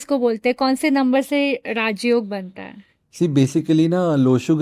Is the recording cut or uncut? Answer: uncut